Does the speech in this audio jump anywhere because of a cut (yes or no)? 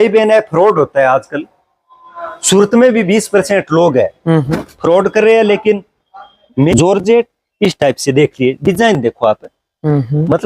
yes